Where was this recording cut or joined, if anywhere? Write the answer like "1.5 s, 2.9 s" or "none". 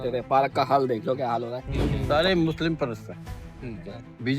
1.9 s